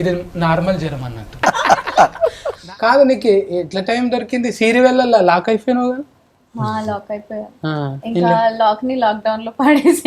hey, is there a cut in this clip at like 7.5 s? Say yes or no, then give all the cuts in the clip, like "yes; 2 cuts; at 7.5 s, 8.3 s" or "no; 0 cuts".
no; 2 cuts; at 1.4 s, 2.6 s